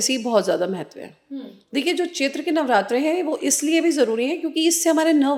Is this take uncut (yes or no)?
yes